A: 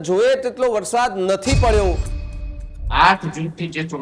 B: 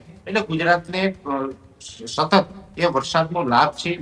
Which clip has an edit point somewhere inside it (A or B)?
A